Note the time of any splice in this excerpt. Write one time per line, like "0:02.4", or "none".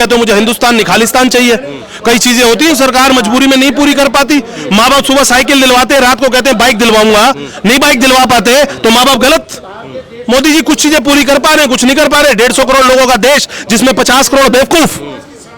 none